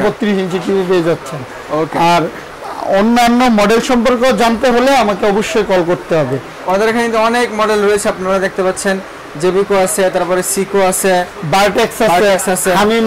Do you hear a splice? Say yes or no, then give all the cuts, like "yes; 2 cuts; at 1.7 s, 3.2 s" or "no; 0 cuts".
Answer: no; 0 cuts